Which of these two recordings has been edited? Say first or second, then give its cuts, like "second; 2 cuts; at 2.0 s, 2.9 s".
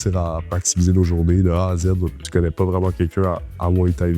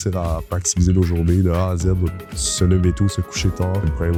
first; 1 cut; at 2.2 s